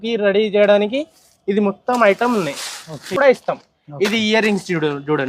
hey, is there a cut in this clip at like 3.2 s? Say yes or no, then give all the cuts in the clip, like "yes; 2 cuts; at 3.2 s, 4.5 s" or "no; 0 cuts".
yes; 1 cut; at 3.2 s